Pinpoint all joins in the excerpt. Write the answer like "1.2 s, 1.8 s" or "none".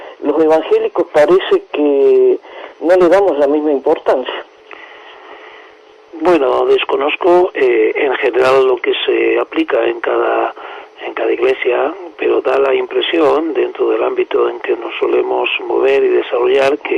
14.4 s